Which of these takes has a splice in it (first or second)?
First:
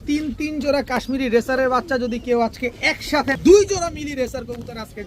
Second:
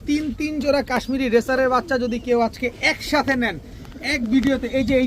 first